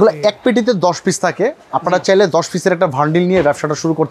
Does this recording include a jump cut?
no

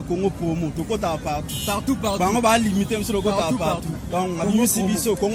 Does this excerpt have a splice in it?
no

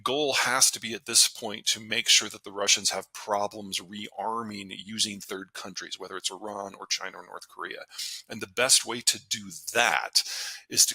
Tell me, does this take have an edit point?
no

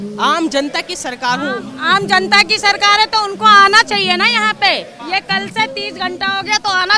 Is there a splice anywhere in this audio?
no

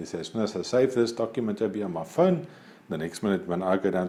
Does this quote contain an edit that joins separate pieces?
no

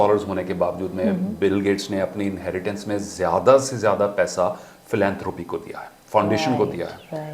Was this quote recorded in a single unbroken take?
yes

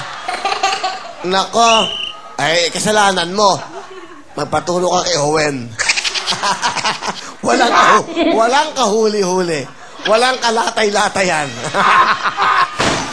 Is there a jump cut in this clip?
yes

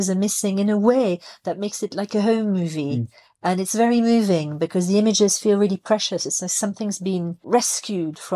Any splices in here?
yes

